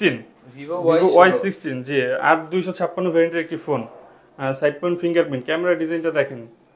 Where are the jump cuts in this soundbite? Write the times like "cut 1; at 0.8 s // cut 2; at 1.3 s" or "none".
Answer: none